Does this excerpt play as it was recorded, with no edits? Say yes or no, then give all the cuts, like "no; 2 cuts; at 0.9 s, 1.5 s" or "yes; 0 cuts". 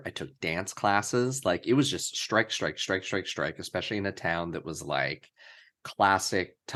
yes; 0 cuts